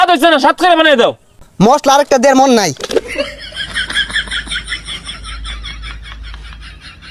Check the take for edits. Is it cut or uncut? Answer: cut